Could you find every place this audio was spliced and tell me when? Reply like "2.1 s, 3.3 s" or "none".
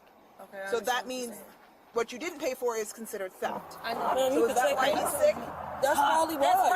3.7 s